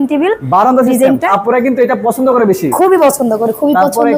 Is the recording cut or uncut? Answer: cut